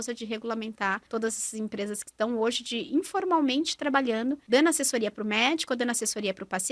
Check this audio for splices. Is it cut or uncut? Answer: cut